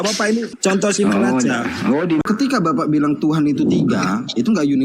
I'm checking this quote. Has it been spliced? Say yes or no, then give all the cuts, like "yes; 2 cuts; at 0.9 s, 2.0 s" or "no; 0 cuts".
yes; 1 cut; at 2.2 s